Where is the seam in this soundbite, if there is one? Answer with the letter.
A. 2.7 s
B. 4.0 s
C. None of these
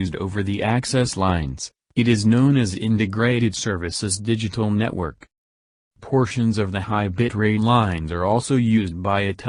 C